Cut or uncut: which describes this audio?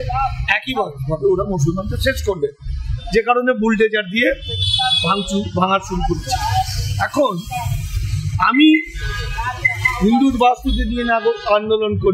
uncut